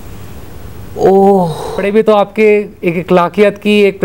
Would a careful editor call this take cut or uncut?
uncut